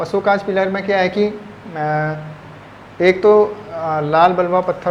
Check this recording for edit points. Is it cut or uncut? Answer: uncut